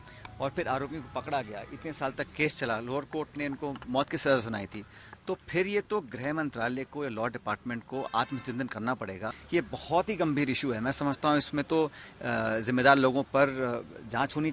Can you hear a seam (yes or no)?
yes